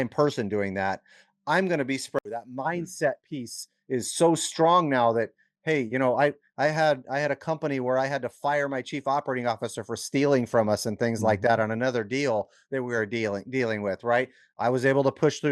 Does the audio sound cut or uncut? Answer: cut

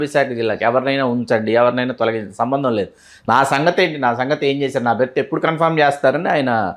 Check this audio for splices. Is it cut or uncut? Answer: uncut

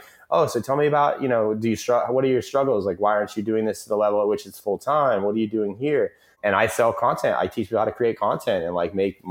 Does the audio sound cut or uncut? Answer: uncut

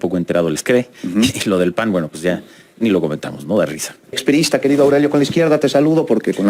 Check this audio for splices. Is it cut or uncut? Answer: cut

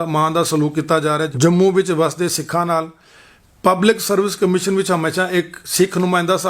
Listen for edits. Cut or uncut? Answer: cut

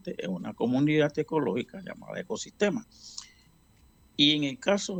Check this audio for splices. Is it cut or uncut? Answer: uncut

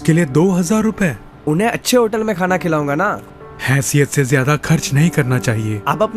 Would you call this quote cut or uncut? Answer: cut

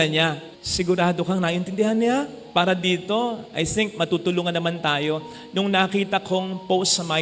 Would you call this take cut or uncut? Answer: uncut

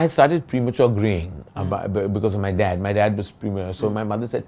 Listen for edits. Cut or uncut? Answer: uncut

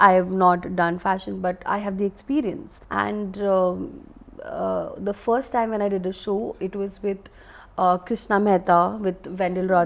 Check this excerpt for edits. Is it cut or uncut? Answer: uncut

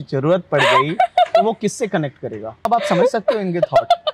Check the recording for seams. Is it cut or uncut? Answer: cut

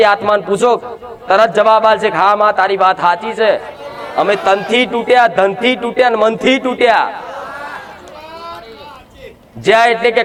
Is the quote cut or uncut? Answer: uncut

